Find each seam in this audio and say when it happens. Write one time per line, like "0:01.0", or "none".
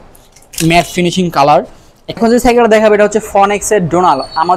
0:02.1